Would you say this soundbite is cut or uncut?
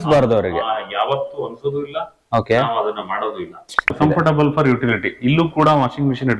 cut